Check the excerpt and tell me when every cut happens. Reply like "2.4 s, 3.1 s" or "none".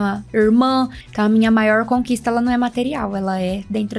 1.0 s